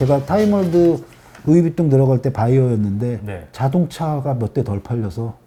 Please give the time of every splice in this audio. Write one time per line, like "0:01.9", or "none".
none